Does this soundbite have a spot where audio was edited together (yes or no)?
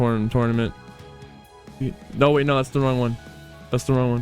no